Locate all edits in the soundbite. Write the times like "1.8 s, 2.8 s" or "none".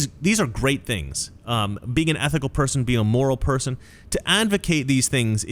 none